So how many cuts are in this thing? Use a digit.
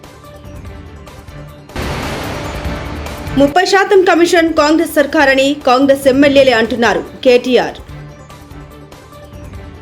1